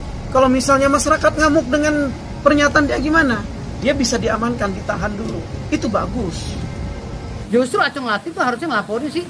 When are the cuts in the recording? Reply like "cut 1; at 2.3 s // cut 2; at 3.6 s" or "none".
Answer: cut 1; at 7.3 s